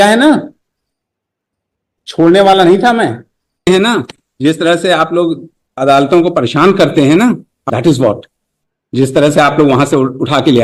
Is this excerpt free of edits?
no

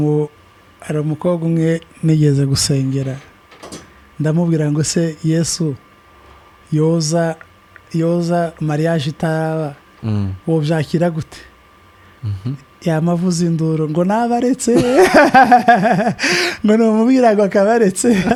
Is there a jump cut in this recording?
no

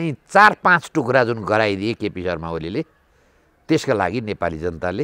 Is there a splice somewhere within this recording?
no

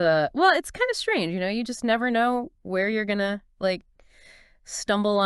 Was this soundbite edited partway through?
yes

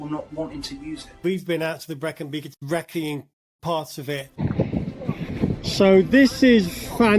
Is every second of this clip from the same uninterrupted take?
no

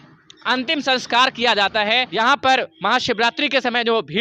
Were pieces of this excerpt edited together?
yes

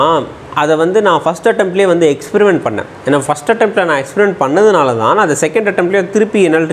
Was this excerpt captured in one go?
yes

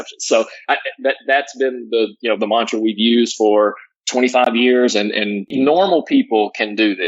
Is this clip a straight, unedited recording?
no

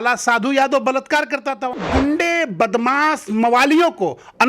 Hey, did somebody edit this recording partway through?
yes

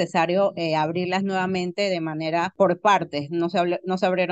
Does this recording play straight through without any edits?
no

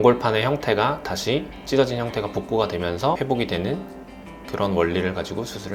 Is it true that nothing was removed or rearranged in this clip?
yes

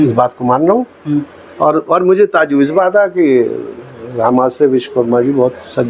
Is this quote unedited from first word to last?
yes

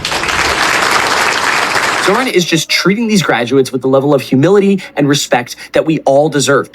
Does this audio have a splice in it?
yes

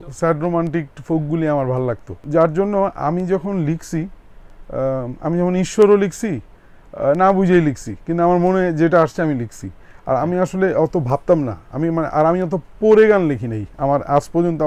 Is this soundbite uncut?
no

